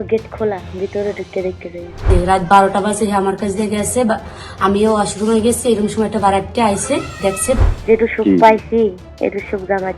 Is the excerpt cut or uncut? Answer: cut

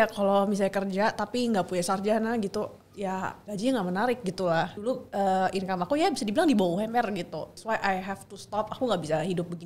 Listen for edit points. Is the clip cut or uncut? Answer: cut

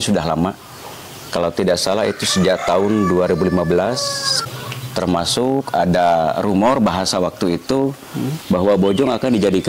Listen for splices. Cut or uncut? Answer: cut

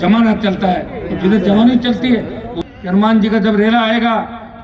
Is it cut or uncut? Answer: cut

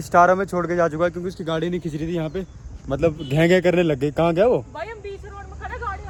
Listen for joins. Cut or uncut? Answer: uncut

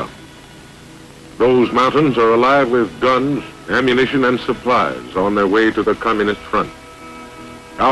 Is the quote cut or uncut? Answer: uncut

